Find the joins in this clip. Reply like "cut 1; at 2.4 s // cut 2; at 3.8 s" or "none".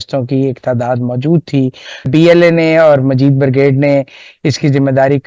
cut 1; at 2.1 s